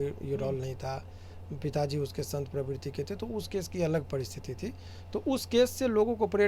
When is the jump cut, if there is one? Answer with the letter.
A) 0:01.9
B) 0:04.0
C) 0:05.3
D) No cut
D